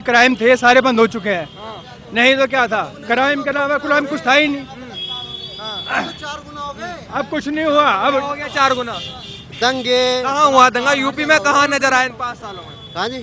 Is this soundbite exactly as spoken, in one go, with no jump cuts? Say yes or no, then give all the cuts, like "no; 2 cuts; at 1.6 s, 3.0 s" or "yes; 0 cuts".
yes; 0 cuts